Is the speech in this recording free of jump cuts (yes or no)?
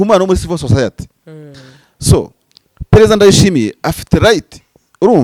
yes